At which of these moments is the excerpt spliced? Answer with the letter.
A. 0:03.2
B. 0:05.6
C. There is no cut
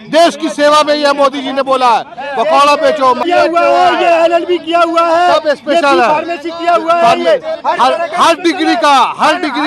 A